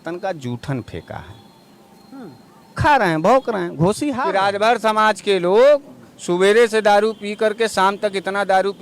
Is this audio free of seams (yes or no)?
no